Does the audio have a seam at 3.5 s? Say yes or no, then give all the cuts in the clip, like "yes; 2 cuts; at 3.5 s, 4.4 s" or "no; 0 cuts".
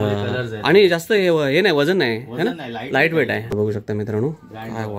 yes; 1 cut; at 3.5 s